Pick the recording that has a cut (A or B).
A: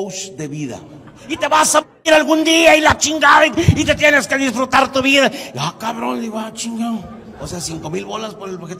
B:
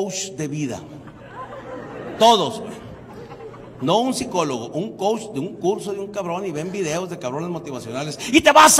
A